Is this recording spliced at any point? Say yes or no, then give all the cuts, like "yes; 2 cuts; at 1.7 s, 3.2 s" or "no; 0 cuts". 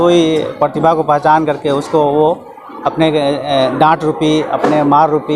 no; 0 cuts